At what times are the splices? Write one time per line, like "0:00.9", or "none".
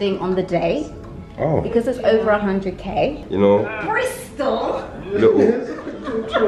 0:03.3